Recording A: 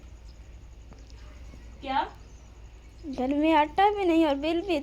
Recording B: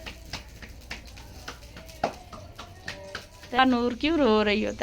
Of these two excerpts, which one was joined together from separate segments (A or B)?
B